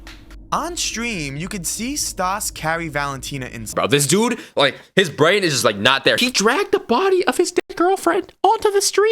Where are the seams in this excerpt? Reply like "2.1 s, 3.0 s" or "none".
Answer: 3.7 s, 6.2 s